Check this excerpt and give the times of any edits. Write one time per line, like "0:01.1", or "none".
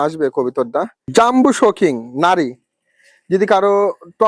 0:01.1